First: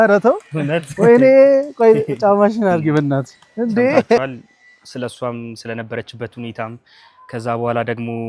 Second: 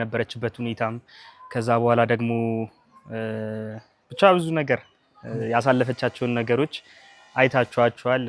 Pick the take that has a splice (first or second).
first